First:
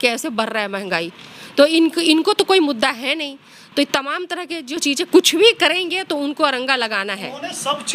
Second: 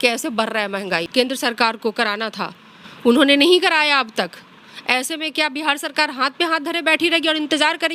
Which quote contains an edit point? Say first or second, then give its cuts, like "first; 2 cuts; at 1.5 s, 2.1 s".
second; 1 cut; at 1.0 s